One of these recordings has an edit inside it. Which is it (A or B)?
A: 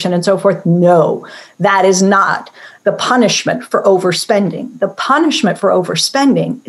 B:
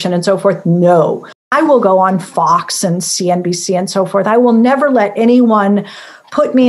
B